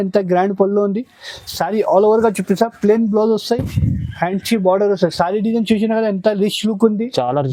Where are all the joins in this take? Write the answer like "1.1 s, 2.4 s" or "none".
none